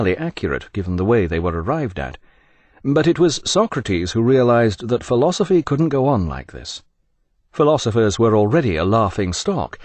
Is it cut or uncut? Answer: uncut